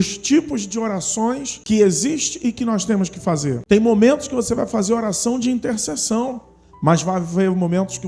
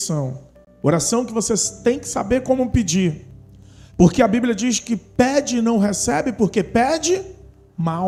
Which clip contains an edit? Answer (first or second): first